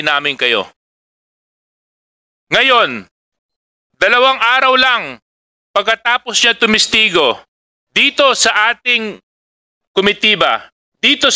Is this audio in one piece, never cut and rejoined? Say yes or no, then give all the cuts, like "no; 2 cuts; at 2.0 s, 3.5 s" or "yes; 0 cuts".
yes; 0 cuts